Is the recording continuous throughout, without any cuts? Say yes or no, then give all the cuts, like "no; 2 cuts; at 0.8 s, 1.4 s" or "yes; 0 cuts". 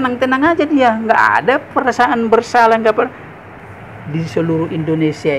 no; 1 cut; at 3.7 s